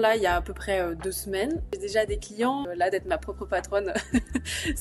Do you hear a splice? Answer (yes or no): yes